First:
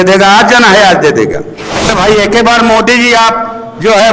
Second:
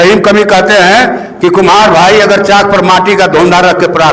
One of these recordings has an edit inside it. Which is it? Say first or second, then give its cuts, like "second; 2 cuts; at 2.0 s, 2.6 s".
first; 1 cut; at 1.9 s